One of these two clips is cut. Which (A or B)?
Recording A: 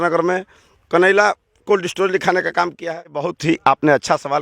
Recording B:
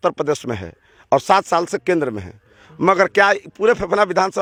A